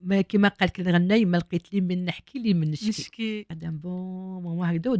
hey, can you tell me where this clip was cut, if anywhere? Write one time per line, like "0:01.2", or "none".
0:03.5